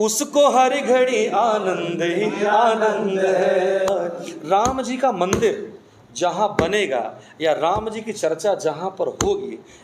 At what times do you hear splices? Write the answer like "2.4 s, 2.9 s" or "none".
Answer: 3.9 s